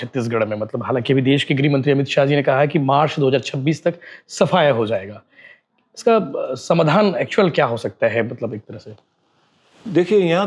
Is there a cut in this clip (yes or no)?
no